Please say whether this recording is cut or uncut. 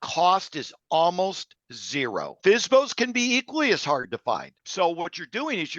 cut